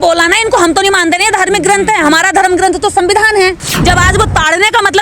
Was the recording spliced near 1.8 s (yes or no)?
no